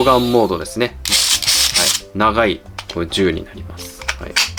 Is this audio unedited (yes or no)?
yes